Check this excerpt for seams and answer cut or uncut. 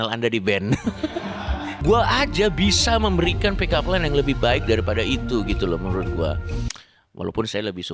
cut